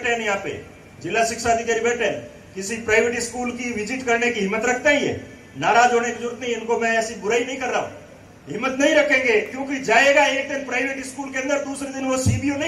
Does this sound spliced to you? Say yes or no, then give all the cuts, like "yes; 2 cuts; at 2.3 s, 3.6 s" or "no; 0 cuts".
no; 0 cuts